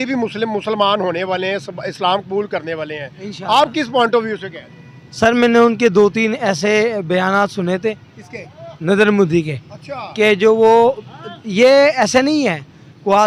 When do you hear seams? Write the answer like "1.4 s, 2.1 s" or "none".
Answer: none